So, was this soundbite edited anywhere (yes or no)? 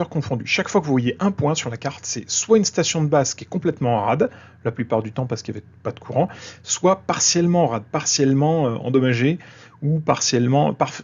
no